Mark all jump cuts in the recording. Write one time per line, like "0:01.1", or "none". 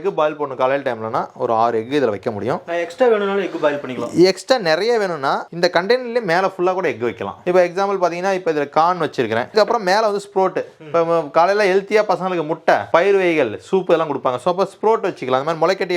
none